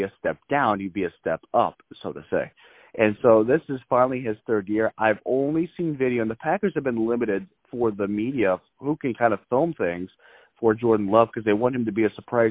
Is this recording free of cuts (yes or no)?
yes